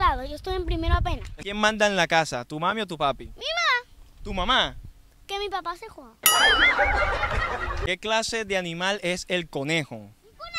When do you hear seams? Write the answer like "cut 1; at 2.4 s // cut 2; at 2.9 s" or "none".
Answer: cut 1; at 1.3 s // cut 2; at 7.8 s